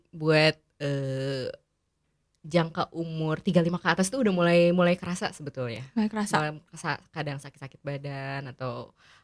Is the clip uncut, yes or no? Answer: yes